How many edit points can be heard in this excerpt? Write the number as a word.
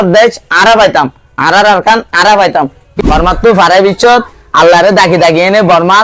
one